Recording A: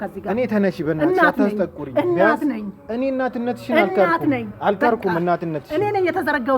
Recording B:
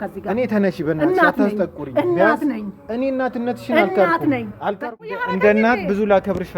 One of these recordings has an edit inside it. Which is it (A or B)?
B